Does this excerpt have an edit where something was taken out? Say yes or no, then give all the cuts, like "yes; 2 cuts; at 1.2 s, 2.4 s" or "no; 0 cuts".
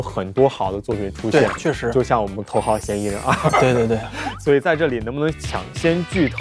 yes; 2 cuts; at 2.4 s, 5.4 s